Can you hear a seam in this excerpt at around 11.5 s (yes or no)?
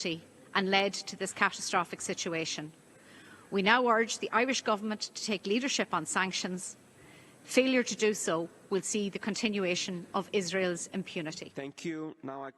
yes